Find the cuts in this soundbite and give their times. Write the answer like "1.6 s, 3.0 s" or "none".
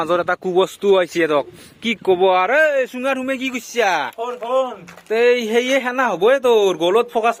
none